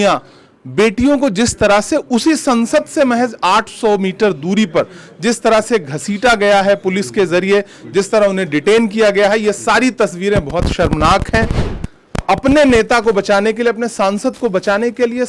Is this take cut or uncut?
cut